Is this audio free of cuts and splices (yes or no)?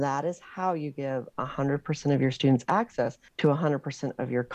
no